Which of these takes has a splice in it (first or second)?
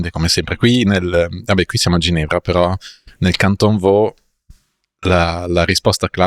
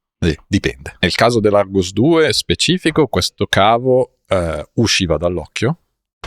second